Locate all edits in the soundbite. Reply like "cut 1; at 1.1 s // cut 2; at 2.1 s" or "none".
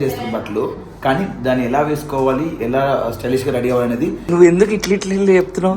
cut 1; at 4.2 s